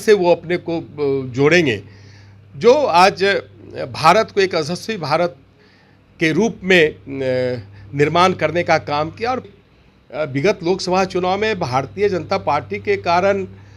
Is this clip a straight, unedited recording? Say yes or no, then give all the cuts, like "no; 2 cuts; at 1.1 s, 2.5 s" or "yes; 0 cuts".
no; 1 cut; at 9.5 s